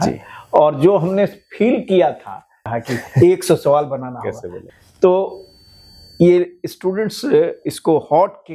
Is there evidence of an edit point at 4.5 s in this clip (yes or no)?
yes